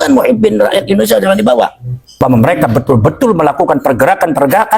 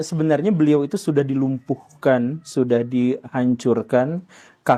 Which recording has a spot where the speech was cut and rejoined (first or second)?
first